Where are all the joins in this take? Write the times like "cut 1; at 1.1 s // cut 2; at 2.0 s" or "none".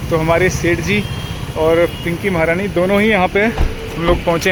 none